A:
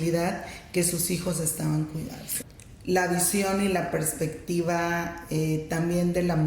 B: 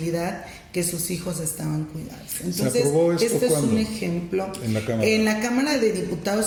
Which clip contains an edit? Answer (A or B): A